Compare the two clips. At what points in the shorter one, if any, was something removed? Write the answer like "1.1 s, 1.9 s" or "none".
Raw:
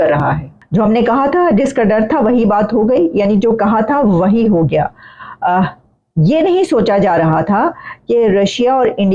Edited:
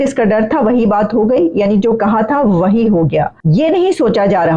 3.4 s